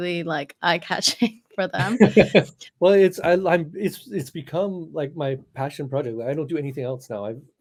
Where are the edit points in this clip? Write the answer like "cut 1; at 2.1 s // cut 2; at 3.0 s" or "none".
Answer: none